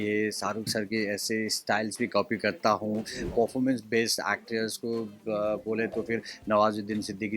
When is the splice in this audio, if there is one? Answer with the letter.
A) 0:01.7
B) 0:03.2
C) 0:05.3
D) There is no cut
B